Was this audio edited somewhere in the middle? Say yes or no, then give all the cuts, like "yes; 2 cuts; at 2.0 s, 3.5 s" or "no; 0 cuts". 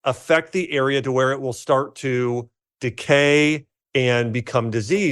yes; 1 cut; at 2.6 s